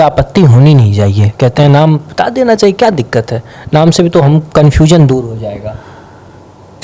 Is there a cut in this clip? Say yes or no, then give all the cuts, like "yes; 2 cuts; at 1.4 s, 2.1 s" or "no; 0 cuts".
no; 0 cuts